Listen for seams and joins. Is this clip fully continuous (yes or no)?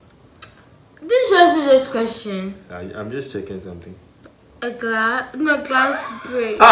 yes